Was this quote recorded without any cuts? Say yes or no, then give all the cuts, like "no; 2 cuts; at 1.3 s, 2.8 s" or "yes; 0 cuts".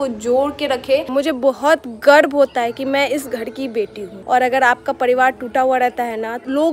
no; 2 cuts; at 1.0 s, 4.1 s